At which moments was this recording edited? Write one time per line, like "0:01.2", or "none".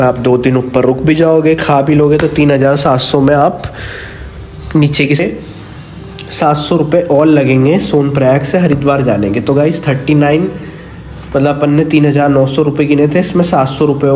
0:05.2